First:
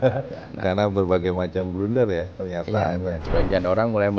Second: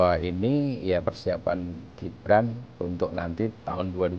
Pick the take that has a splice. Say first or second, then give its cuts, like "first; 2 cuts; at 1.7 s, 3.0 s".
first; 1 cut; at 3.2 s